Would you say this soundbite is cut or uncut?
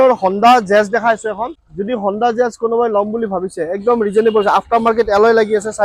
cut